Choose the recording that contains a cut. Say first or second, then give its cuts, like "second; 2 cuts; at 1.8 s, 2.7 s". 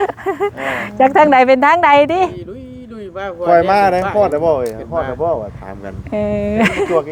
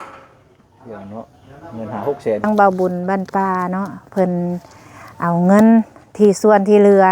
second; 1 cut; at 2.5 s